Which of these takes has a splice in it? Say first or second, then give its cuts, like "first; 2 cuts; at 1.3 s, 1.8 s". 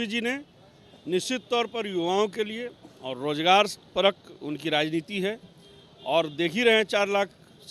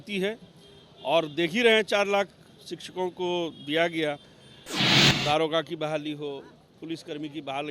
second; 1 cut; at 4.9 s